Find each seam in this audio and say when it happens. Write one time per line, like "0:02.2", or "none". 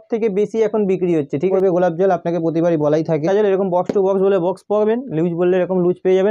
0:01.5
0:03.3